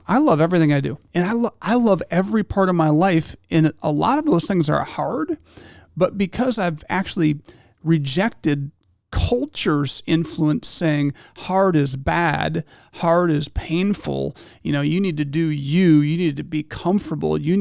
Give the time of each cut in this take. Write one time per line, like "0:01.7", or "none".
0:01.0

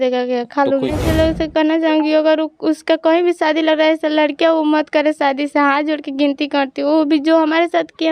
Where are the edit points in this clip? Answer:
0:01.0

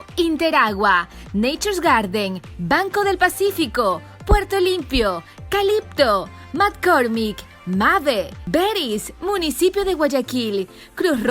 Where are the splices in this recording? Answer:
0:08.4

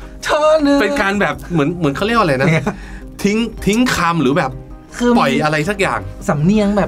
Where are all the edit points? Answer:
none

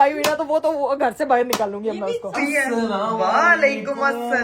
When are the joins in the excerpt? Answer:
0:02.3

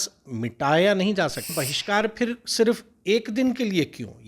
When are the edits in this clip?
0:01.5

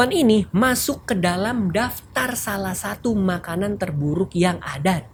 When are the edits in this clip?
none

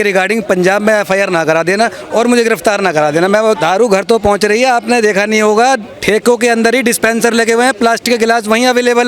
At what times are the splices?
0:03.6

